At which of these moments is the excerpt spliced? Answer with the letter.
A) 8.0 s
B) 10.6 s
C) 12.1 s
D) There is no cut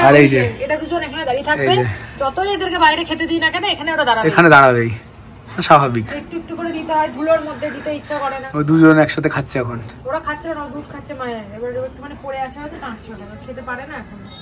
D